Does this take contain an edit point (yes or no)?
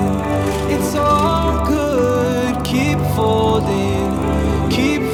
no